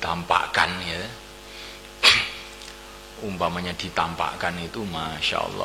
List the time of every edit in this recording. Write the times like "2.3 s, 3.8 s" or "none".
none